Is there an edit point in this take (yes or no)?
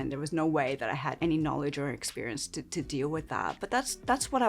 yes